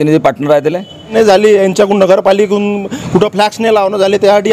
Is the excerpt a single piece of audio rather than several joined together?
no; 1 cut; at 1.1 s

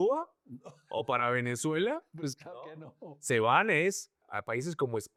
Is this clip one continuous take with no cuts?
yes; 0 cuts

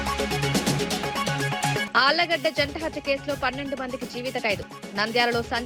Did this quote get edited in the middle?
no; 0 cuts

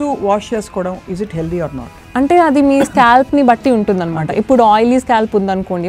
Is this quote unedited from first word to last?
no; 1 cut; at 1.9 s

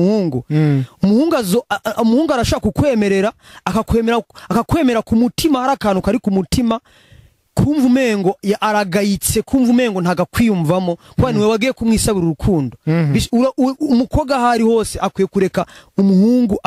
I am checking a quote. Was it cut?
no; 0 cuts

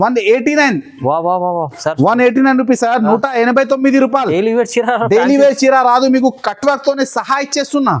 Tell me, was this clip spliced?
no; 0 cuts

